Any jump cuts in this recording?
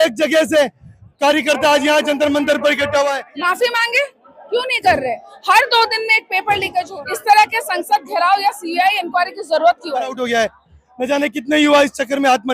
yes; 3 cuts; at 3.2 s, 6.9 s, 10.2 s

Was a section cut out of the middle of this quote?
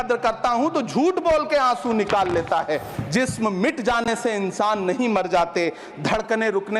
yes; 1 cut; at 2.9 s

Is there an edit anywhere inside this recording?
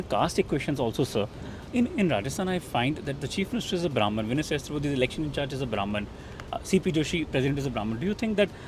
no; 0 cuts

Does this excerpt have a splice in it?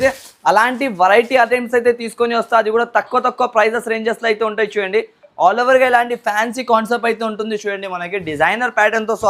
no; 0 cuts

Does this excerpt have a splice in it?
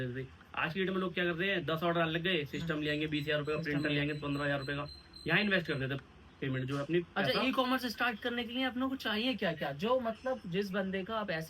no; 0 cuts

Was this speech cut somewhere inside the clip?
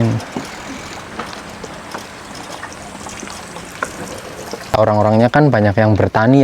yes; 1 cut; at 4.7 s

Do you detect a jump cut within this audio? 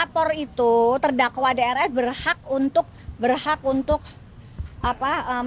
no; 0 cuts

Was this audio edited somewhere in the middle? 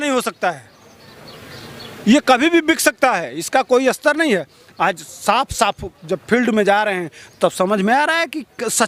no; 0 cuts

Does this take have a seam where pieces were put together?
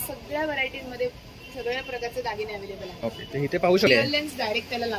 yes; 1 cut; at 3.9 s

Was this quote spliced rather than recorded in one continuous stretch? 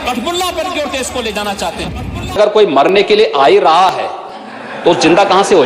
yes; 1 cut; at 2.4 s

